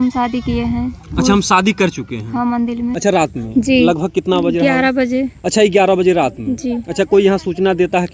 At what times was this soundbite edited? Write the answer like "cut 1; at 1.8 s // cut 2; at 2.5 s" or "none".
cut 1; at 2.9 s